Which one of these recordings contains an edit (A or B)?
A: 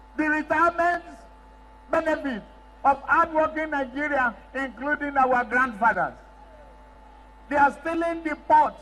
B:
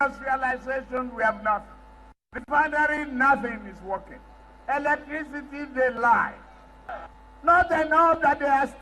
B